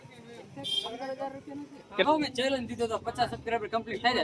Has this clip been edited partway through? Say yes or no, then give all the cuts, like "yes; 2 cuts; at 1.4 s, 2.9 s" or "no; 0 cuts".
yes; 1 cut; at 2.0 s